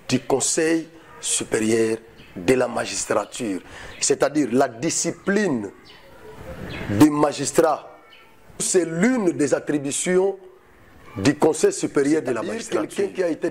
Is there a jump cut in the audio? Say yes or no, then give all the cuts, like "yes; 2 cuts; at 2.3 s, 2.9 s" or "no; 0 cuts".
yes; 2 cuts; at 8.7 s, 12.6 s